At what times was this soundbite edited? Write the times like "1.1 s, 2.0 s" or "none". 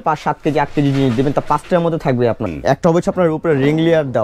2.5 s